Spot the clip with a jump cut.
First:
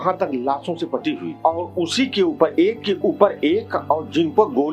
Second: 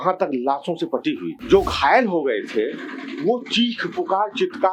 second; 1 cut; at 1.3 s

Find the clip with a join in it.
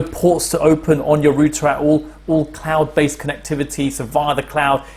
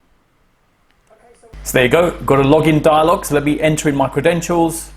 second; 1 cut; at 1.5 s

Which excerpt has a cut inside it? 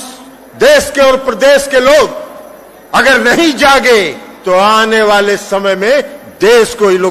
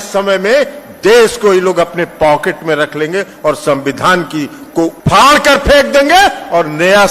second; 1 cut; at 5.0 s

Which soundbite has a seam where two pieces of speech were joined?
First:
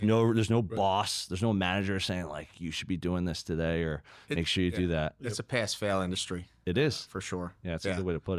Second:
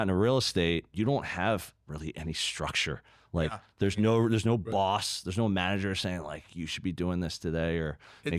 second; 1 cut; at 0.9 s

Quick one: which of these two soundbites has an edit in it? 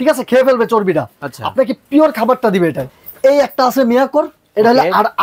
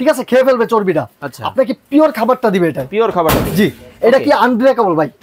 first; 1 cut; at 2.8 s

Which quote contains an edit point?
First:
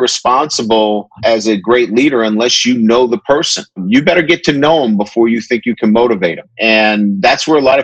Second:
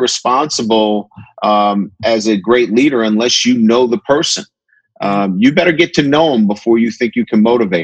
first; 3 cuts; at 1.1 s, 3.8 s, 6.5 s

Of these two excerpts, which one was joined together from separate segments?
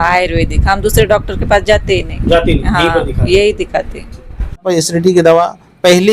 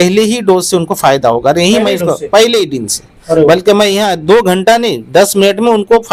first; 1 cut; at 4.6 s

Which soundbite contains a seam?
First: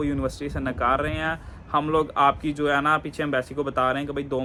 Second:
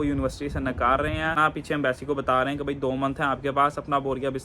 second; 1 cut; at 1.4 s

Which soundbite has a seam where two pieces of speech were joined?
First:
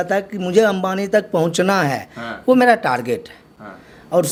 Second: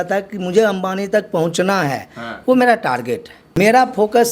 second; 1 cut; at 3.4 s

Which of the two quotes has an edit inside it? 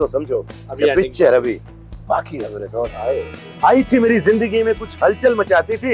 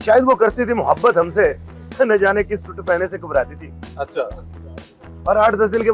first; 1 cut; at 3.4 s

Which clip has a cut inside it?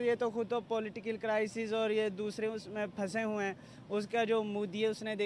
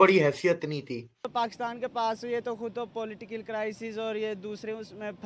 second; 1 cut; at 1.3 s

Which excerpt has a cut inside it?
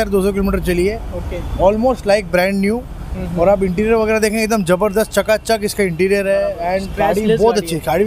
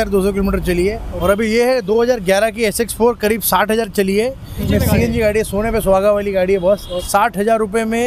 second; 3 cuts; at 1.1 s, 4.6 s, 7.0 s

